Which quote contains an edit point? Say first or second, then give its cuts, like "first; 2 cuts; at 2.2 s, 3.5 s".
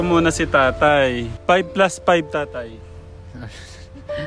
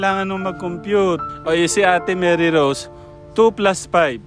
second; 1 cut; at 1.3 s